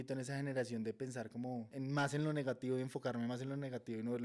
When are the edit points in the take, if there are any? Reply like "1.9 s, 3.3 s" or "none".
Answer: 1.7 s